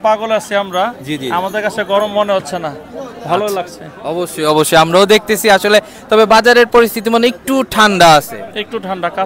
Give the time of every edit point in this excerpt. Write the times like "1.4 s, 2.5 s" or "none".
none